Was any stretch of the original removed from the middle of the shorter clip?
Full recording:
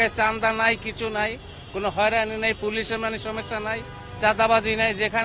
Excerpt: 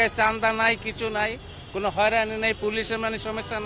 no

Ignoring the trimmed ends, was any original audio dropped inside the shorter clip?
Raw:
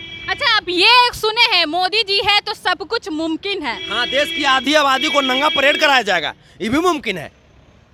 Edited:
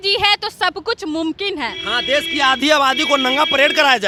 no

